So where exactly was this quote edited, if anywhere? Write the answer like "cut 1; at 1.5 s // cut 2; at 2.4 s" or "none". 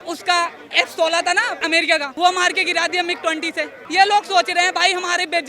cut 1; at 2.1 s // cut 2; at 3.8 s